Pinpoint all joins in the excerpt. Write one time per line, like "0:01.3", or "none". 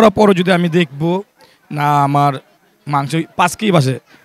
none

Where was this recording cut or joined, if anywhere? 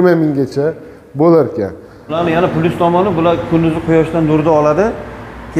0:02.0

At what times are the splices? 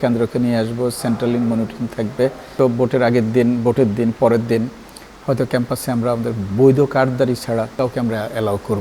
0:02.6
0:07.8

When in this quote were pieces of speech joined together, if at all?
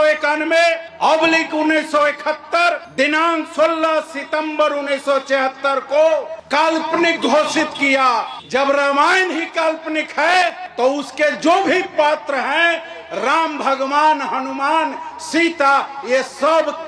none

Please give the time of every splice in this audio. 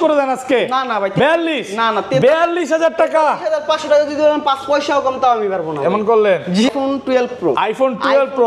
0:06.7

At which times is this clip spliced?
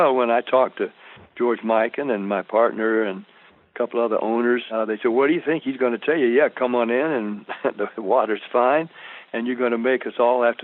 0:04.7

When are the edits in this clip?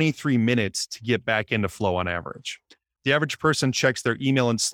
0:02.8

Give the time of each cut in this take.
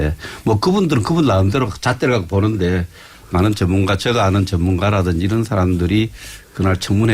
0:02.6

